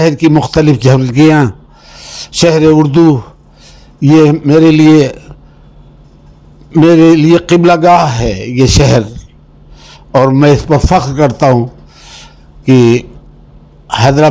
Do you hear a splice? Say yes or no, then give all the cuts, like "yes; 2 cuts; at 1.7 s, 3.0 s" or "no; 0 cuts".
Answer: no; 0 cuts